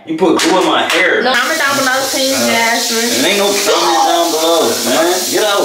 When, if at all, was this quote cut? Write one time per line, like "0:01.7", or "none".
0:01.3